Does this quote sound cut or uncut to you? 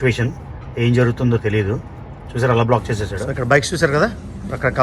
cut